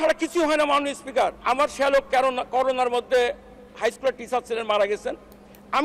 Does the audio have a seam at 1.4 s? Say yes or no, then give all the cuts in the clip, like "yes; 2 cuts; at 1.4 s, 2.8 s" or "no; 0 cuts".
yes; 1 cut; at 1.4 s